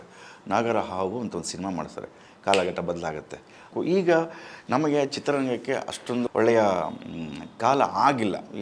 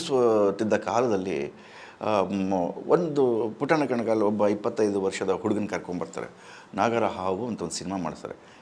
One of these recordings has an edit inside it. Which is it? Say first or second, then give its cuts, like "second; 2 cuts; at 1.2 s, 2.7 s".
first; 2 cuts; at 3.7 s, 6.3 s